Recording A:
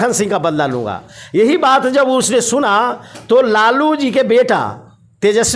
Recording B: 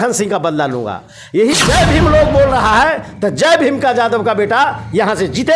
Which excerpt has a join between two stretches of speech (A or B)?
B